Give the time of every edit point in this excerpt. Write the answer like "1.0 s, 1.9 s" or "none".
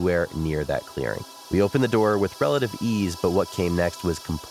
1.3 s